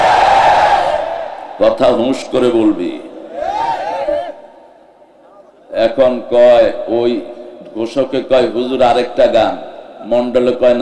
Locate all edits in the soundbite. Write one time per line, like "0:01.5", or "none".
none